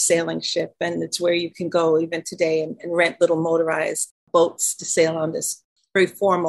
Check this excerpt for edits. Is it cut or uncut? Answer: cut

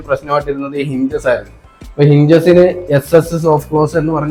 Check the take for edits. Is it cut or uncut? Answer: uncut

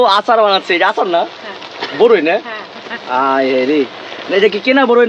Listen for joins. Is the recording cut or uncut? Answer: uncut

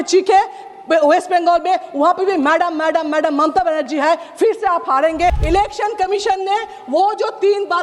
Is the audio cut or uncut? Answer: cut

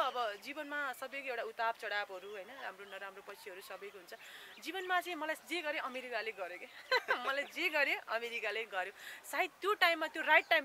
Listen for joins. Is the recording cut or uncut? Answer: uncut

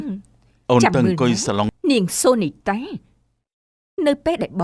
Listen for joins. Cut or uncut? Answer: cut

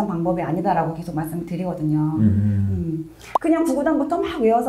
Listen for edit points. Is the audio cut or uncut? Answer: cut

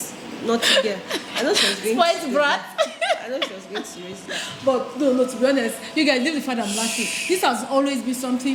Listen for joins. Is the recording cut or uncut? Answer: uncut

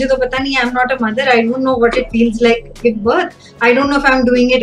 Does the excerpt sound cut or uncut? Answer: uncut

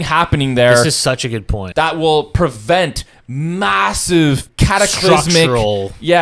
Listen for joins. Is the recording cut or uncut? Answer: cut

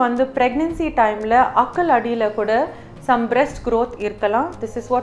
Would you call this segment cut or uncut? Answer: uncut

